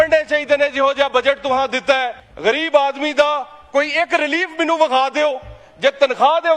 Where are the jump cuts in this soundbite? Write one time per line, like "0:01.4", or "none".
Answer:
0:02.2